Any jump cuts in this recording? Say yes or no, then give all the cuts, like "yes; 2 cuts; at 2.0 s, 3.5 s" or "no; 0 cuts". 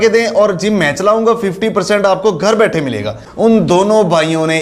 yes; 1 cut; at 3.2 s